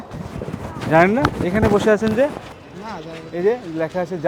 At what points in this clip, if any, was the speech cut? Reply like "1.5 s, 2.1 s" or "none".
2.5 s